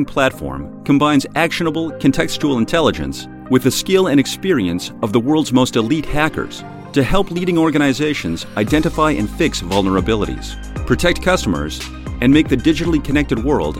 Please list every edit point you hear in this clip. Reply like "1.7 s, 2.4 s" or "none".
none